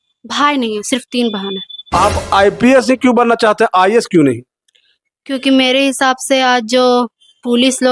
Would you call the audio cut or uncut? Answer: cut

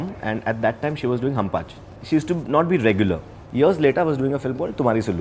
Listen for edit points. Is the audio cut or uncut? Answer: cut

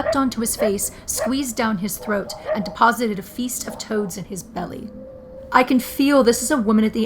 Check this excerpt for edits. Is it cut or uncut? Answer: cut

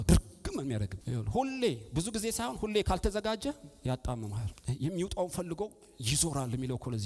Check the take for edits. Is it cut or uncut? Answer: cut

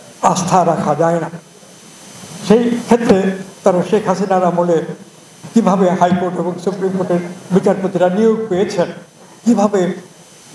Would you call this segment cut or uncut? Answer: uncut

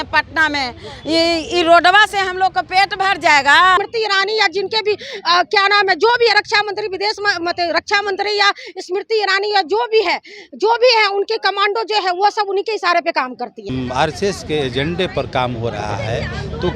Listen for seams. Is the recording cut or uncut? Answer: cut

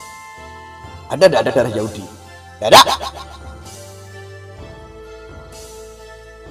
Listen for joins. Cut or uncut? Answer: uncut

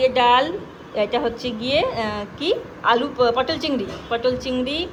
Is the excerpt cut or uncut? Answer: uncut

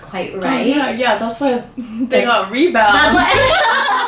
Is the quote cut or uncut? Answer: uncut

